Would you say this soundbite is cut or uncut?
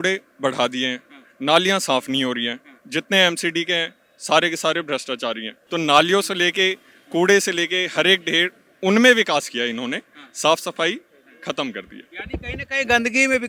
uncut